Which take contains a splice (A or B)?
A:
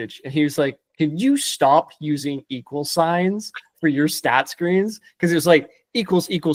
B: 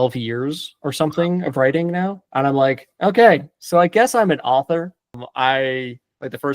B